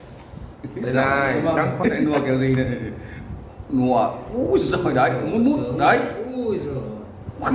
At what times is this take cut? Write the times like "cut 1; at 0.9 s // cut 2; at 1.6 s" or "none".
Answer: cut 1; at 1.9 s